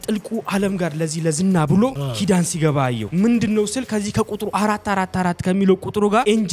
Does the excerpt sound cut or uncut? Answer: uncut